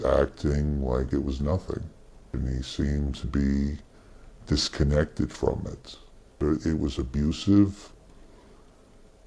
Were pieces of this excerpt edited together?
no; 0 cuts

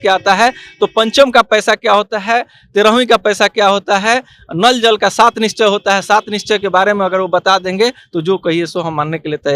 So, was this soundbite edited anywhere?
no; 0 cuts

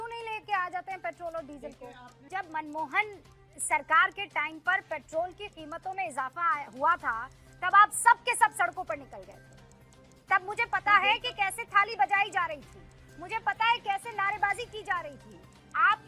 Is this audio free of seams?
no; 1 cut; at 2.2 s

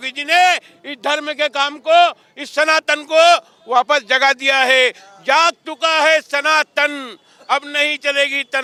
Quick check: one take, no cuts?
yes; 0 cuts

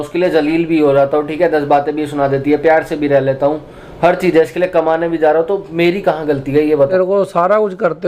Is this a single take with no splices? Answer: no; 1 cut; at 6.9 s

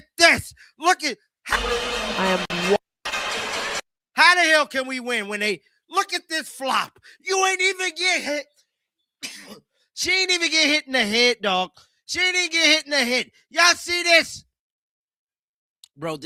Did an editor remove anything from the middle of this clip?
no; 0 cuts

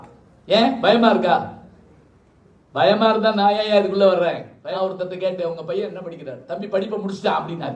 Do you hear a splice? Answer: yes; 1 cut; at 4.5 s

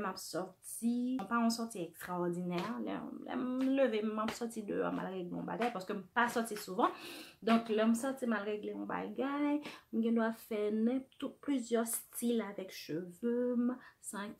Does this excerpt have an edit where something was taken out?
yes; 1 cut; at 1.2 s

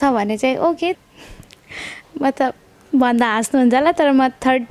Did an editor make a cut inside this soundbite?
yes; 1 cut; at 1.0 s

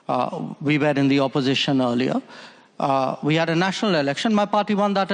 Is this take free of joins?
yes; 0 cuts

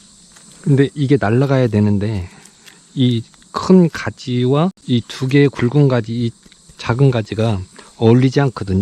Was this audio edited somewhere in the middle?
yes; 1 cut; at 4.8 s

